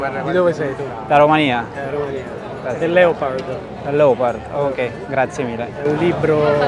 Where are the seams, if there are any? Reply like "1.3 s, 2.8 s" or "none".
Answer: none